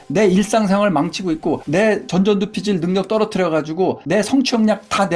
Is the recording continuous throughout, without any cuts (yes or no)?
yes